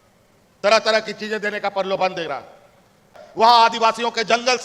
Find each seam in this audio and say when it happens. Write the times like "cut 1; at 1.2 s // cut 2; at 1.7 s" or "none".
cut 1; at 3.2 s